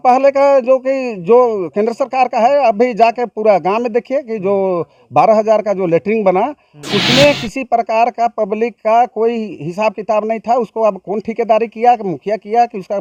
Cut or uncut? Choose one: uncut